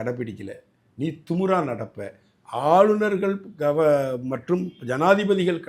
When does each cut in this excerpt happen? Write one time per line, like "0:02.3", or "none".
none